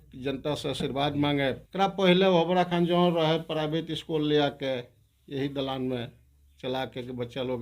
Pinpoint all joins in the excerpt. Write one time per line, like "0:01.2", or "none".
0:01.6